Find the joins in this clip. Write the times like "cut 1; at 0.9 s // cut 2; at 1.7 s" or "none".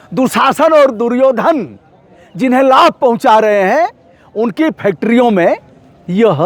none